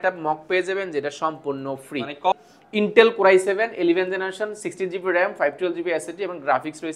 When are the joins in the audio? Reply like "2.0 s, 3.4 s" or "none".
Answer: 2.3 s